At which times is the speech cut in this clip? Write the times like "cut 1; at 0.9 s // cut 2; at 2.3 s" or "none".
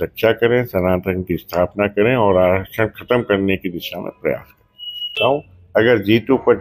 none